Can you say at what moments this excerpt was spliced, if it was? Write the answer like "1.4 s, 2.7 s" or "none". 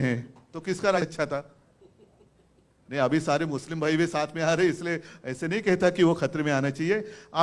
1.0 s